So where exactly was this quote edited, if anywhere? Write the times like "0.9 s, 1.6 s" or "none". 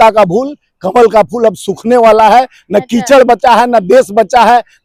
none